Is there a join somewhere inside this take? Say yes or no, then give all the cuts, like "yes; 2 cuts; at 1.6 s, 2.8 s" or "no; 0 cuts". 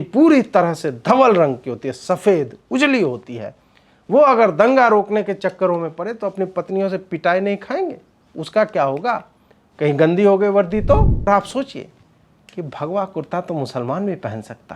yes; 1 cut; at 11.3 s